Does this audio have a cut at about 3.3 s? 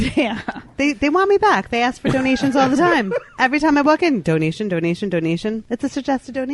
yes; 2 cuts; at 3.3 s, 5.6 s

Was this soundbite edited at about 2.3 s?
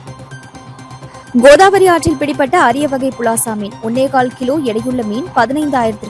no; 1 cut; at 0.9 s

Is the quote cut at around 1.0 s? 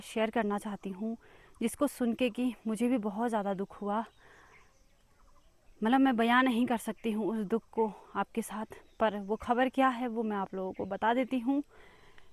no; 0 cuts

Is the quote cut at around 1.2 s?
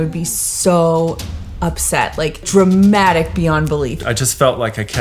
no; 2 cuts; at 2.4 s, 3.9 s

